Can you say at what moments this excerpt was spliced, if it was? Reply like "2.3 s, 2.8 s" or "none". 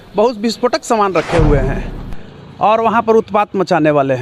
none